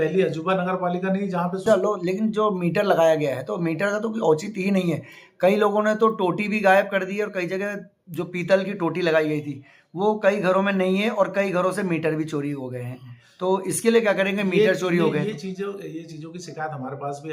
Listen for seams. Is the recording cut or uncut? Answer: cut